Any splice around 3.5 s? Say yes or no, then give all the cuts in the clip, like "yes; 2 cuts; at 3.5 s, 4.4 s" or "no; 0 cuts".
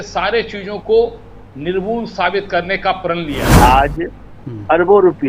yes; 1 cut; at 3.5 s